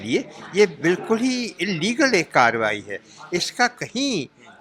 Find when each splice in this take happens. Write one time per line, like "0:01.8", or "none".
none

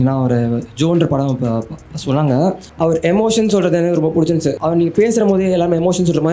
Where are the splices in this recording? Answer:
0:02.7
0:04.6

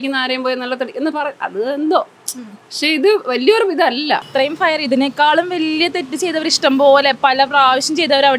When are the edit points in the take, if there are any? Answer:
0:04.3

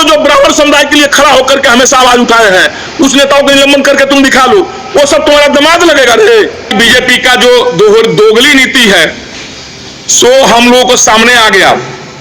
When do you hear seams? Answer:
0:06.7

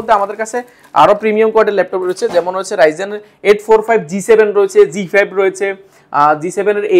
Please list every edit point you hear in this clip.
none

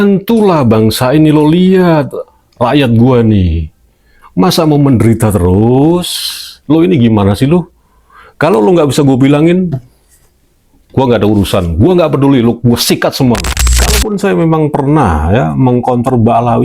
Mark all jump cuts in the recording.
0:13.6

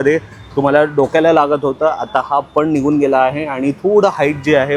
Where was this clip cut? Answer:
none

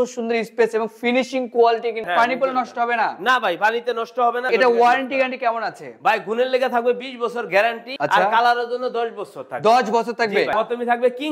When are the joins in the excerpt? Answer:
0:02.1
0:04.5
0:07.9
0:10.5

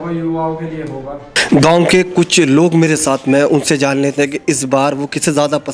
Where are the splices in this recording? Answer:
none

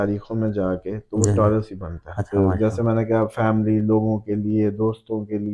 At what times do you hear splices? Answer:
0:02.3

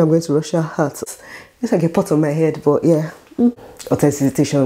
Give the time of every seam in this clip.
0:01.0
0:03.7

